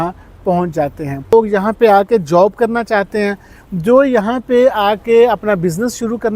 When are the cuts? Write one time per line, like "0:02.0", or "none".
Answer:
0:01.3